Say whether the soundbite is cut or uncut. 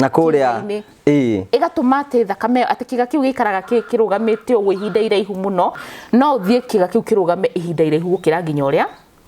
cut